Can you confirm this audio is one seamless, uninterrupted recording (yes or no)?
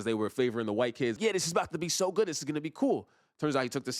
no